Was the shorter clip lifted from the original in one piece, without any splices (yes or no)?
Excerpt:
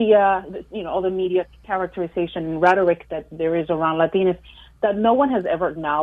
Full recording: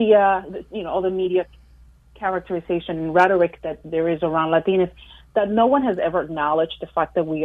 no